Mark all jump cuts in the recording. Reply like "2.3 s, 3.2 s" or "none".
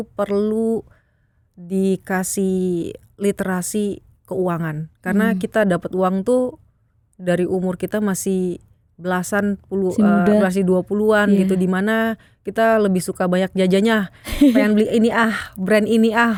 none